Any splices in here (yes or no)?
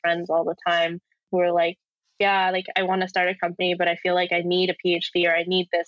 yes